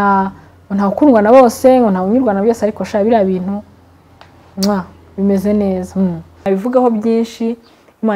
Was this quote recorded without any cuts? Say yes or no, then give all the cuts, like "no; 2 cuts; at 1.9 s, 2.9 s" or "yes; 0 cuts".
no; 1 cut; at 6.4 s